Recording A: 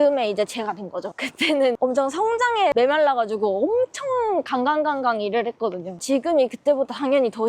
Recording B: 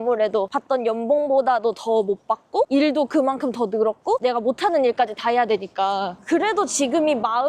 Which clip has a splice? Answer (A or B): A